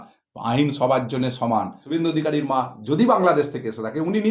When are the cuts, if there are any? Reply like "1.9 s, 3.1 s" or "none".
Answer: 1.8 s